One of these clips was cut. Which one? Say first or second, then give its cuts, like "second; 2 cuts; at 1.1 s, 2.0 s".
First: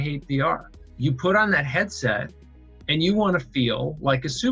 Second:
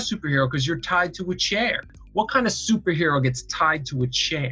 second; 1 cut; at 1.9 s